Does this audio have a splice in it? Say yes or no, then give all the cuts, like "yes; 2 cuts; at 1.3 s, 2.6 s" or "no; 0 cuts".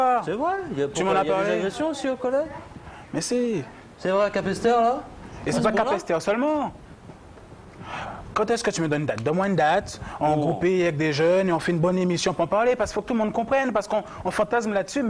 no; 0 cuts